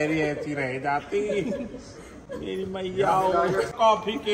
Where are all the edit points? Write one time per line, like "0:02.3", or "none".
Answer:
none